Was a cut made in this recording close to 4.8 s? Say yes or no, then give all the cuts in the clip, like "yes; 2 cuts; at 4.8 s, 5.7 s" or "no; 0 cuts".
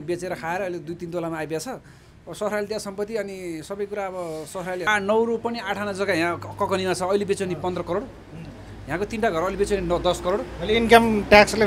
yes; 1 cut; at 4.8 s